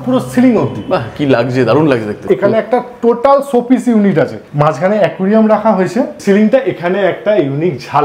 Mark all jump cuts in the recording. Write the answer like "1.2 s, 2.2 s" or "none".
2.2 s, 4.4 s, 6.2 s